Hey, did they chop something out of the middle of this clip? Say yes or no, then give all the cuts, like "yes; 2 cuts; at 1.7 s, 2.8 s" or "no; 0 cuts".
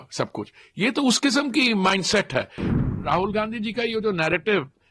yes; 1 cut; at 2.7 s